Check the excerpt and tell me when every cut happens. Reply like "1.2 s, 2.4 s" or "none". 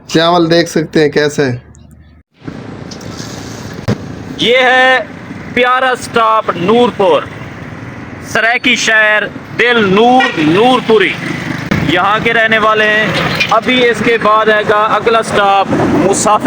none

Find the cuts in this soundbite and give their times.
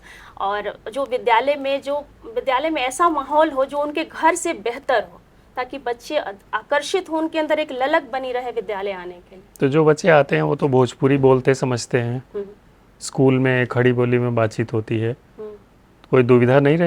none

